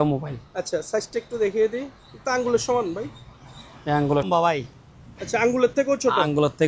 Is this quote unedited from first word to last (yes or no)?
no